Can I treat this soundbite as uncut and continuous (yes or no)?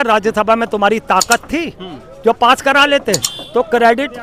yes